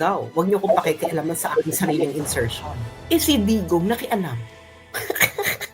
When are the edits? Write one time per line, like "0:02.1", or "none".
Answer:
0:02.9